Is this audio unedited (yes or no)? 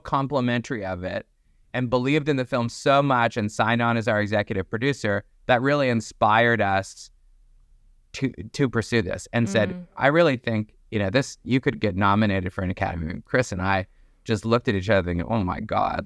yes